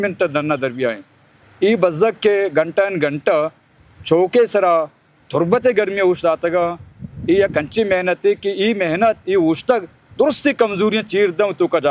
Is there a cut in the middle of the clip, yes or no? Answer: no